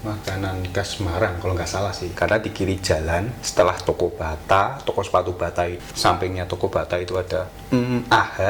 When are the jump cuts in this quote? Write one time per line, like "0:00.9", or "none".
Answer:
0:02.1
0:03.4
0:05.8
0:07.6